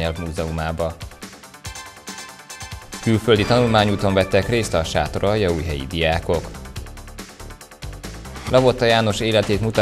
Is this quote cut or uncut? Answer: uncut